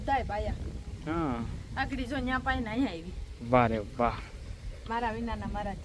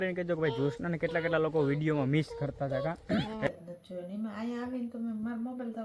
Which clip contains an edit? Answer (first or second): second